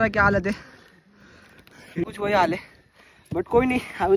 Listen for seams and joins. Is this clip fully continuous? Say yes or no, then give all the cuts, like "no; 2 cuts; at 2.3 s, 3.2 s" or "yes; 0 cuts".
yes; 0 cuts